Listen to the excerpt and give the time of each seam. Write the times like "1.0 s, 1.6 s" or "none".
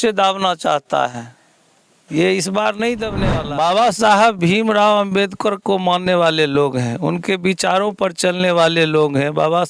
3.2 s